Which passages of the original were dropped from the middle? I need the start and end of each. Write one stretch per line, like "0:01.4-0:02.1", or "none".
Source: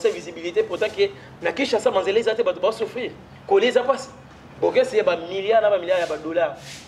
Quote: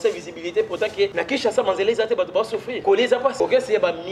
0:01.1-0:01.4
0:03.0-0:03.4
0:04.0-0:04.6

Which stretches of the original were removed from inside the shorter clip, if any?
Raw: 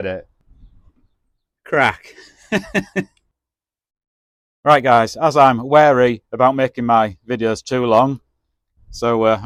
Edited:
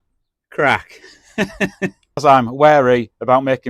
0:03.3-0:05.3

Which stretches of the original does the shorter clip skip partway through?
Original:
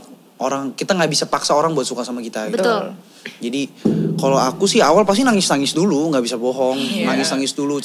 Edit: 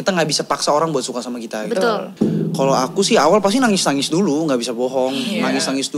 0:02.9-0:03.7

